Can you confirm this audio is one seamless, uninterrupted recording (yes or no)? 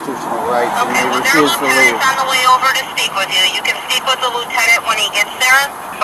yes